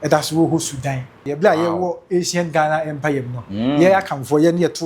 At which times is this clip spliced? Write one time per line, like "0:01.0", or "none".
0:01.2